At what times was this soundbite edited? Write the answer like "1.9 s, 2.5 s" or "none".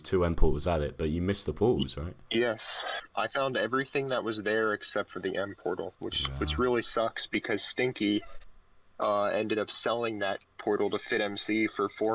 3.0 s